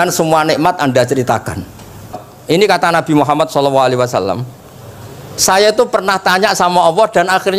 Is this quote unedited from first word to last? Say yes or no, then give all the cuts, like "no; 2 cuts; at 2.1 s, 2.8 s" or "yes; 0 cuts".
no; 1 cut; at 2.3 s